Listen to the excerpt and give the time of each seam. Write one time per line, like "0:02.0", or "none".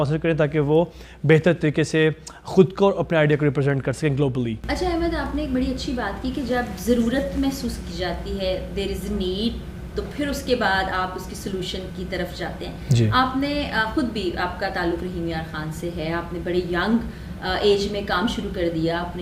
none